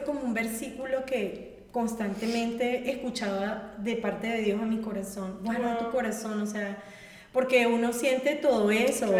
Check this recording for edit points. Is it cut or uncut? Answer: uncut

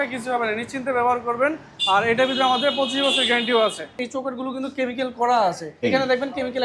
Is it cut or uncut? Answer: cut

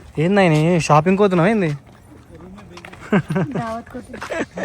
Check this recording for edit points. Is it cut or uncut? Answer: uncut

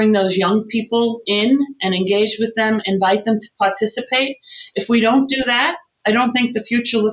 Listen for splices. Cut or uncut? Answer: cut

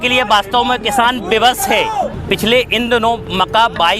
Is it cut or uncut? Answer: cut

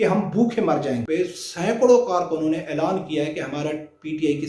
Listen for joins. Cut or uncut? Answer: cut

